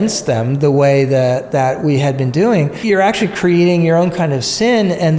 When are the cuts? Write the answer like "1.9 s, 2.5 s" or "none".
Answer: 2.8 s